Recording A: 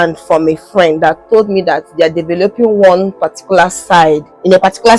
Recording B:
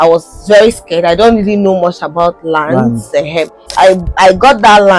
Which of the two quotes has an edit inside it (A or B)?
B